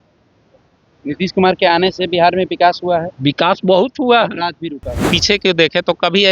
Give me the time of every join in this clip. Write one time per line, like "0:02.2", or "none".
0:05.1